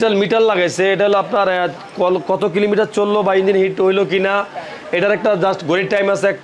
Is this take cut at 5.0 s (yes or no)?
no